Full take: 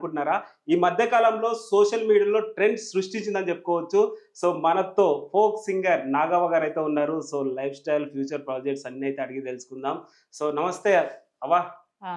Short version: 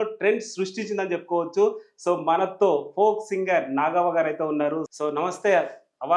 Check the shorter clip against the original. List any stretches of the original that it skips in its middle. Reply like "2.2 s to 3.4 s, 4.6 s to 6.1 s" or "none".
7.3 s to 10.3 s